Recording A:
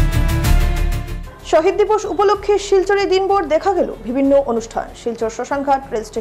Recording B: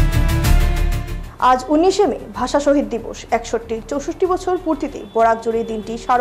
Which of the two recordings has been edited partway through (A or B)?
A